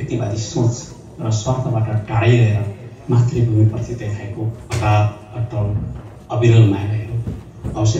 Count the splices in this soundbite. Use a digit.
0